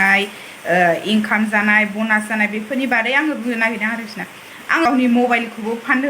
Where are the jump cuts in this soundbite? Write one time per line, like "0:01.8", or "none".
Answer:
0:04.9